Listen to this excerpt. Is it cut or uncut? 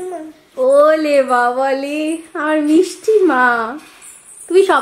uncut